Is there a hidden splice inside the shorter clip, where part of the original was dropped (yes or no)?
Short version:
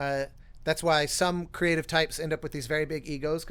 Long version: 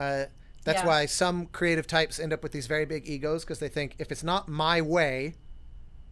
no